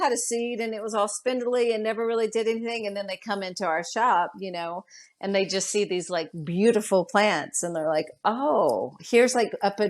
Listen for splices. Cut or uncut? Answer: uncut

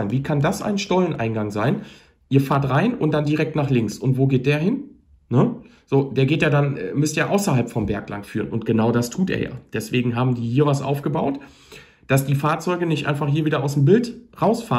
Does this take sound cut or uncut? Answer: uncut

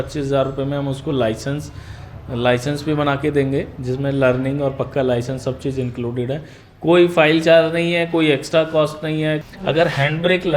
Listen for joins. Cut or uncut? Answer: cut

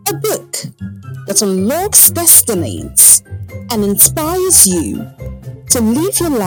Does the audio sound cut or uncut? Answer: uncut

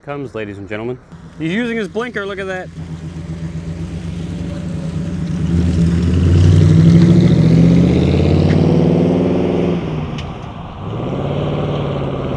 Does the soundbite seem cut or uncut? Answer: cut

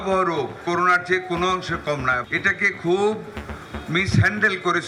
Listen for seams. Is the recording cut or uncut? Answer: uncut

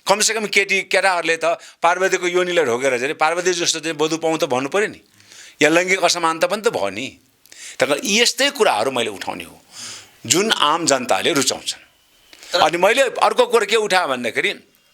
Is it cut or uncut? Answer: uncut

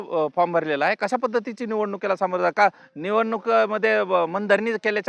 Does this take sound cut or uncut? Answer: uncut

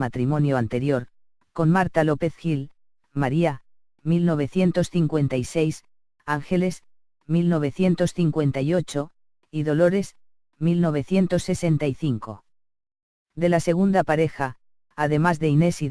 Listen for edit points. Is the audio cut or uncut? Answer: cut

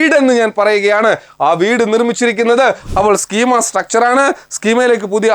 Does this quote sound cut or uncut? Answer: cut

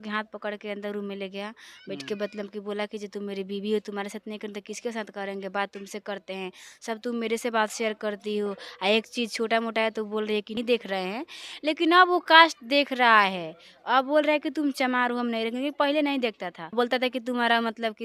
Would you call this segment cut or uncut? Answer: cut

